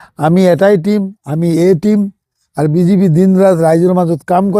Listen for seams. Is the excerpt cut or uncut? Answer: uncut